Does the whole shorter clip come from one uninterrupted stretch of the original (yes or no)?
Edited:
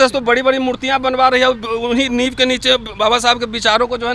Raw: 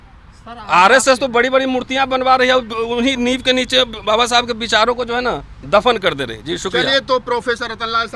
yes